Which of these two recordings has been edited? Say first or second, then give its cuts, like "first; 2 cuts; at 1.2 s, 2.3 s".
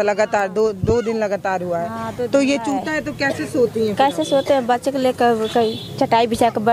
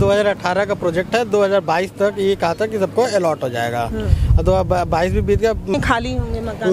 second; 1 cut; at 5.7 s